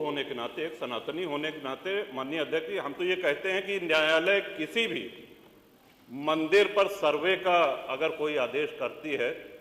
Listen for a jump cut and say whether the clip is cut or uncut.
uncut